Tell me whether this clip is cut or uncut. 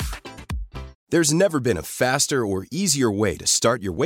cut